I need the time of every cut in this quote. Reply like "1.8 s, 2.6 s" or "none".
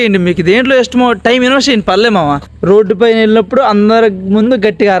2.5 s